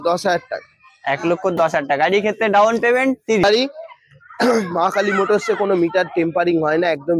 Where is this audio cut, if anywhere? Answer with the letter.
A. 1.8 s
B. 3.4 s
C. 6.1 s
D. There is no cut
B